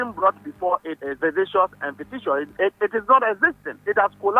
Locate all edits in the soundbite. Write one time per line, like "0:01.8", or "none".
0:01.0
0:02.5